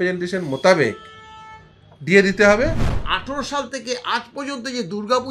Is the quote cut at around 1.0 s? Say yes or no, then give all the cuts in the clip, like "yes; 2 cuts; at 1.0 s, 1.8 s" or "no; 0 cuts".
no; 1 cut; at 3.0 s